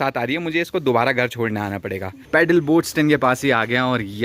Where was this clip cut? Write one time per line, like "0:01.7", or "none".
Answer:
0:02.2